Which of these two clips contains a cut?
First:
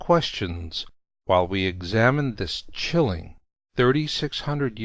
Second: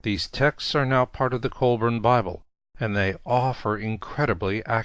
first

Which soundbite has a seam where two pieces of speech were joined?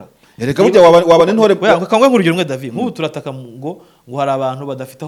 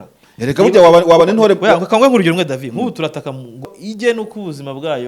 second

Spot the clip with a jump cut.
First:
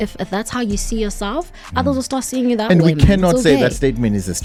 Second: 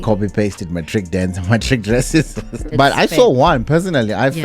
second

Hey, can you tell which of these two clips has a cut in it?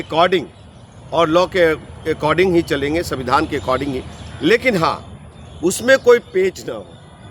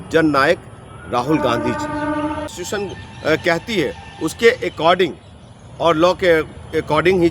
second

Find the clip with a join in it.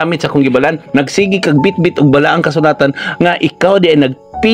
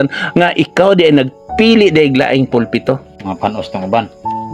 second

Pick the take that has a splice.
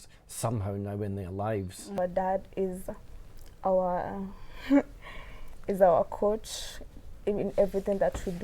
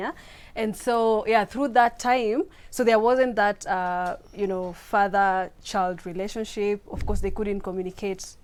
first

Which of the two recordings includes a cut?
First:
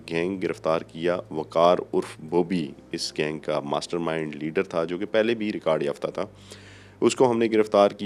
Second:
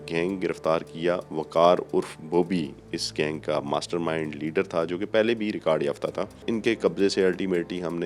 second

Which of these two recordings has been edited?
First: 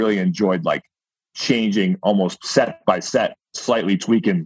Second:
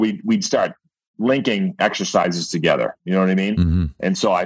first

